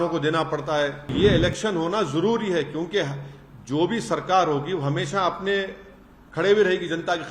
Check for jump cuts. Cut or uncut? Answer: cut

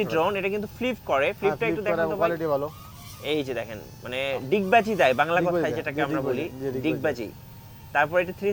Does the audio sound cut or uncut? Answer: uncut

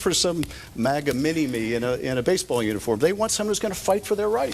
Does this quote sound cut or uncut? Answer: uncut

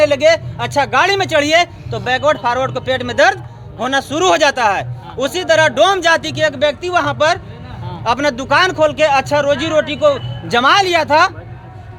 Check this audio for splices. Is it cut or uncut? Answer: uncut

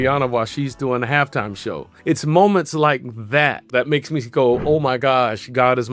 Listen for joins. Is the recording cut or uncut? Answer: cut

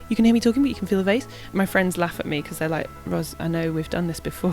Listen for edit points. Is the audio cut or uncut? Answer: cut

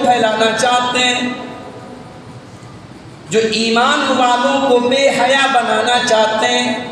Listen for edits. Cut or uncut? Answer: uncut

